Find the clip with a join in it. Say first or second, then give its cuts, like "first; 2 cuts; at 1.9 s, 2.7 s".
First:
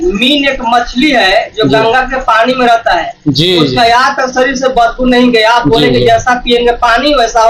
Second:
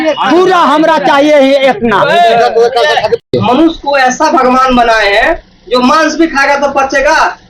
second; 1 cut; at 3.3 s